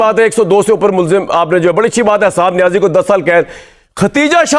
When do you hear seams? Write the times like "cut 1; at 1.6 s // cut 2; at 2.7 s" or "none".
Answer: none